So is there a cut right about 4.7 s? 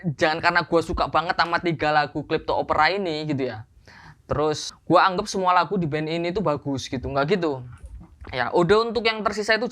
yes; 1 cut; at 4.7 s

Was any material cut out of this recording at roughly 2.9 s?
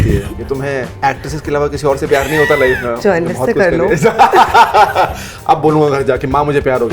yes; 2 cuts; at 0.9 s, 2.9 s

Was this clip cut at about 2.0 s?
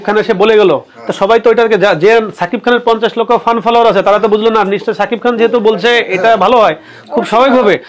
no; 0 cuts

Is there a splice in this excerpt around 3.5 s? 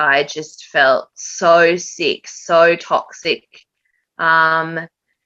no; 0 cuts

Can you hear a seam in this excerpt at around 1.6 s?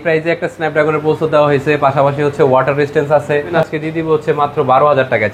no; 1 cut; at 3.5 s

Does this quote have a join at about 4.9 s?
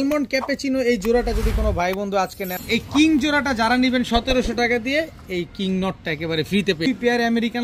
no; 2 cuts; at 2.5 s, 6.9 s

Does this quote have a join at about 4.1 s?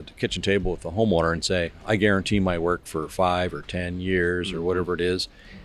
no; 1 cut; at 1.8 s

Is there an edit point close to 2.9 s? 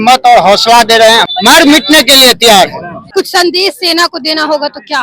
yes; 2 cuts; at 1.3 s, 2.9 s

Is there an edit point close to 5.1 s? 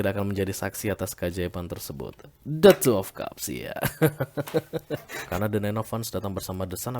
yes; 1 cut; at 5.1 s

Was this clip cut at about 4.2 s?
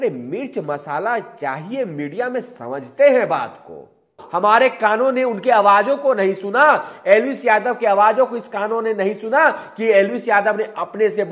yes; 1 cut; at 4.2 s

